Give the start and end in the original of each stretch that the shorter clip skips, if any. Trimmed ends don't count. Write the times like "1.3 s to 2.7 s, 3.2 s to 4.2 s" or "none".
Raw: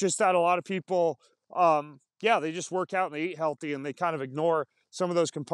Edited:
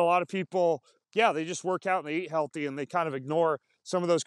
1.3 s to 2.0 s